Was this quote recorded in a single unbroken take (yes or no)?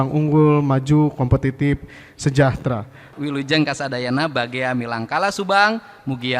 no